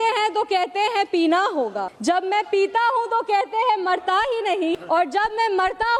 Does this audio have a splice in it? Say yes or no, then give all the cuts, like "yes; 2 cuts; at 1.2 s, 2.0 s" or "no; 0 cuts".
yes; 2 cuts; at 1.9 s, 4.8 s